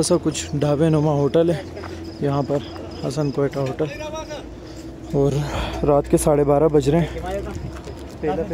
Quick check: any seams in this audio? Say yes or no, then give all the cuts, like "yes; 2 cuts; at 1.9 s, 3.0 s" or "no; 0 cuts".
no; 0 cuts